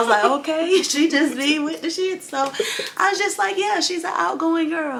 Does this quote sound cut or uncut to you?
uncut